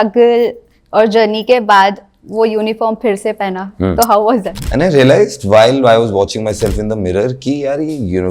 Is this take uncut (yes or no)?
no